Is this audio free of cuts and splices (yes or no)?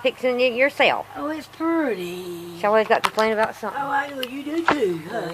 yes